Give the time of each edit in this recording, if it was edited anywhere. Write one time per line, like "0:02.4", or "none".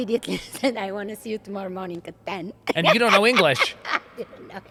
none

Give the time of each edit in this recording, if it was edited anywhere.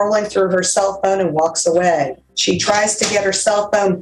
0:02.3

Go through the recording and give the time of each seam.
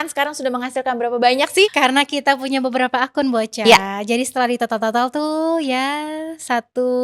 0:01.7

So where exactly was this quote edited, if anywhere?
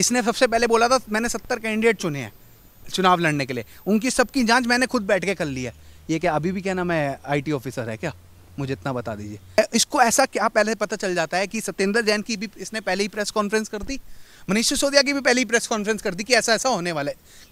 0:09.6

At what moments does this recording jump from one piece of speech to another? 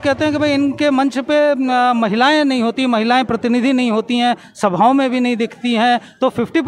none

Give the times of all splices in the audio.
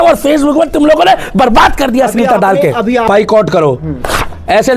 0:03.1

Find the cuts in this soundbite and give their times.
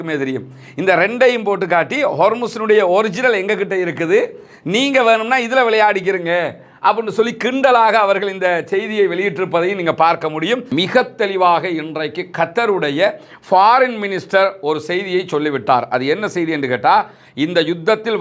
0:10.7

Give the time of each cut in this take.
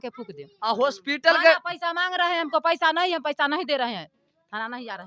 none

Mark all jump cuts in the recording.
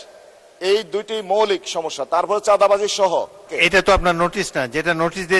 0:03.5

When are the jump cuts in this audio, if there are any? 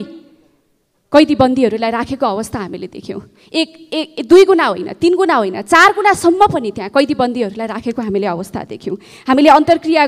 none

